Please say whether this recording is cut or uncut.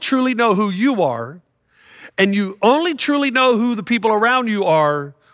uncut